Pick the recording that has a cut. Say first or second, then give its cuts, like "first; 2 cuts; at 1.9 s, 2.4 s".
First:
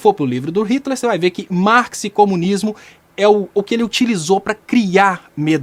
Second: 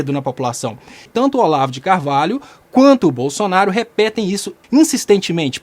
second; 2 cuts; at 1.0 s, 4.6 s